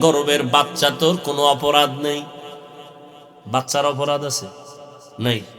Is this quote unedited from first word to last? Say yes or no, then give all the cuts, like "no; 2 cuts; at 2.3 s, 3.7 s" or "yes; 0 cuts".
yes; 0 cuts